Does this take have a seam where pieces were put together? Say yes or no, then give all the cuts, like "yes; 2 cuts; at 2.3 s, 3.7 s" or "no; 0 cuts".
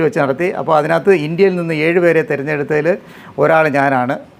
no; 0 cuts